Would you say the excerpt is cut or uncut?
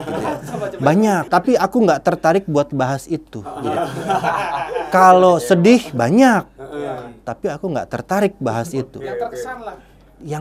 cut